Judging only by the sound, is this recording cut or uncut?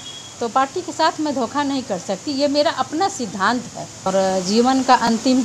cut